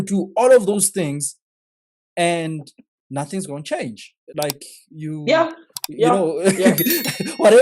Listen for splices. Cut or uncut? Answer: uncut